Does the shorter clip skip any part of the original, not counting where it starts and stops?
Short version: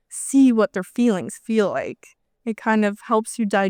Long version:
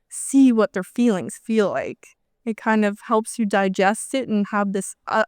no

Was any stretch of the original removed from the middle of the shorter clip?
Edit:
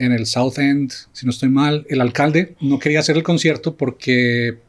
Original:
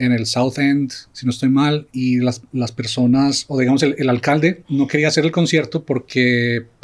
yes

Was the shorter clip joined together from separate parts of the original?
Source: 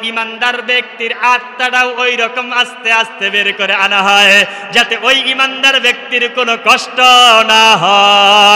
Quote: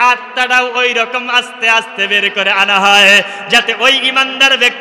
no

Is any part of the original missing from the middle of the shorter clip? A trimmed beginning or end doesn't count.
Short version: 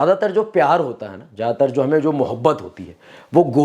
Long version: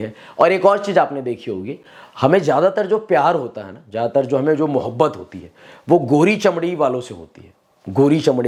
no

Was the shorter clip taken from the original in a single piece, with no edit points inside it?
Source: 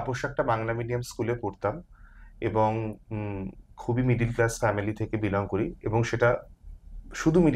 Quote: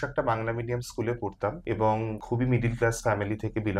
no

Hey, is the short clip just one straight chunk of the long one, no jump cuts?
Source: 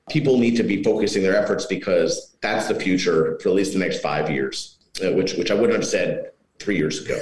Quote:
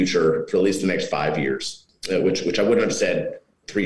yes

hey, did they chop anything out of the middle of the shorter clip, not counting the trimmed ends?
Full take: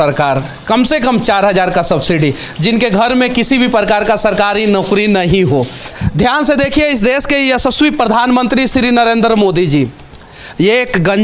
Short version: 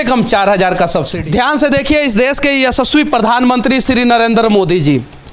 yes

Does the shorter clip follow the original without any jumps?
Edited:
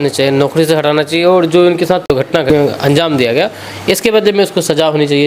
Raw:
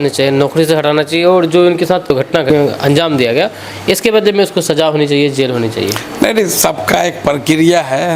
yes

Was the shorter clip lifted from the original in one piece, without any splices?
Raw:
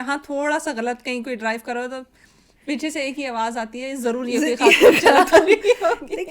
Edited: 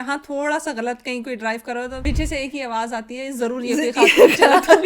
no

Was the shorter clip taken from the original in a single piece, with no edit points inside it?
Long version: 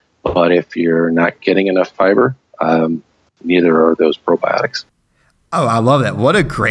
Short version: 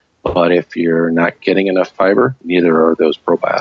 no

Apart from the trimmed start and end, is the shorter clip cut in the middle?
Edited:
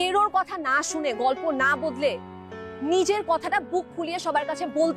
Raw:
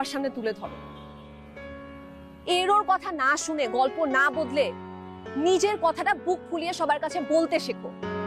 no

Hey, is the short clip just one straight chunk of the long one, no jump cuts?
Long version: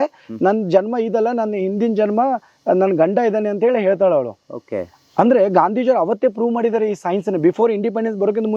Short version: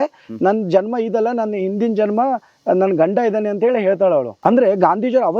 no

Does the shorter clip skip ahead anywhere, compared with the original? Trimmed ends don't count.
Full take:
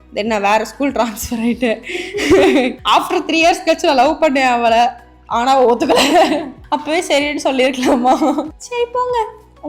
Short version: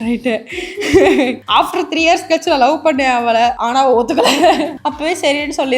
yes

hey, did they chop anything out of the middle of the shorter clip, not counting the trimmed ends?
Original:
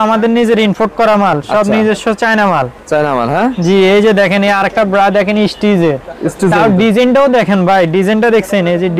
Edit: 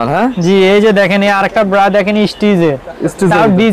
no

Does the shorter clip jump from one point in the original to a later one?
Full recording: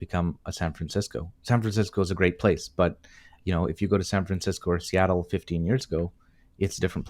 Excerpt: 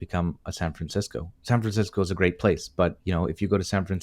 yes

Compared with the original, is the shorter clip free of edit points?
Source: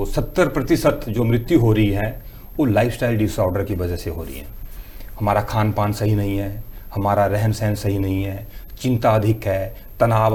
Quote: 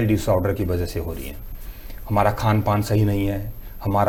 yes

